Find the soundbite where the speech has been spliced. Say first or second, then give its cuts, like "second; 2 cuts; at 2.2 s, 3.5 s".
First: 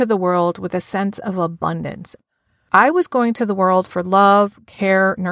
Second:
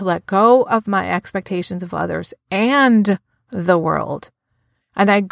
first; 1 cut; at 2.4 s